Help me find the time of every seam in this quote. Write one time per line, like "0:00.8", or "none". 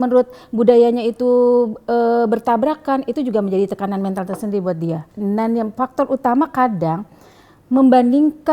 0:05.1